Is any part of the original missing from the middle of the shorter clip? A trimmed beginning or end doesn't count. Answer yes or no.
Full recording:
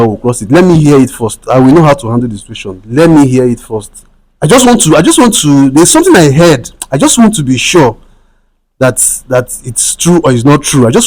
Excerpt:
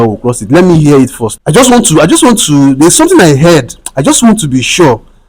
yes